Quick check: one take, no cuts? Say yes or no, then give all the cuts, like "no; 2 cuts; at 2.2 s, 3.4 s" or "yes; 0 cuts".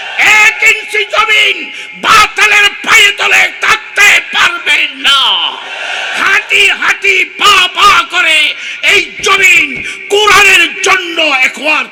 yes; 0 cuts